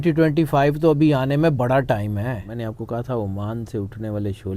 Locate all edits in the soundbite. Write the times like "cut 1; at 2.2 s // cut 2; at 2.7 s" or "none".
cut 1; at 2.5 s